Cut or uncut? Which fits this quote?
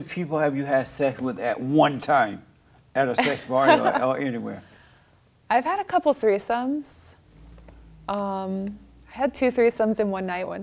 uncut